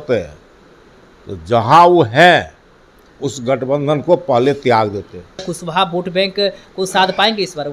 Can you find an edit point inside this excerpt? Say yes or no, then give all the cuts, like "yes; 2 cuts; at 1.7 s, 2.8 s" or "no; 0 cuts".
yes; 1 cut; at 5.6 s